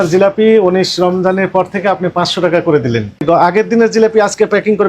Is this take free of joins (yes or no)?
no